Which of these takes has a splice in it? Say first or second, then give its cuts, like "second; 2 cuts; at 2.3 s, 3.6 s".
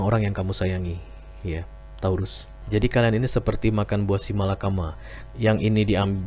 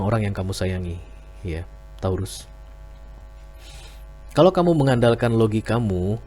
first; 1 cut; at 2.5 s